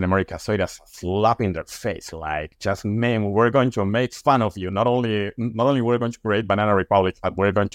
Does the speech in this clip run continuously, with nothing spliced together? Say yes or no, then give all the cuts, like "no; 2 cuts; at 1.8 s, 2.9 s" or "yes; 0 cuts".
yes; 0 cuts